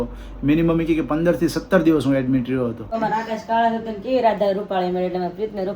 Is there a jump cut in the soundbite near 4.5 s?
no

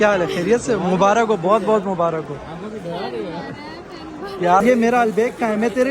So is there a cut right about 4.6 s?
yes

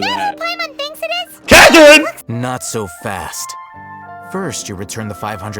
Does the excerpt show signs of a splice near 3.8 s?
no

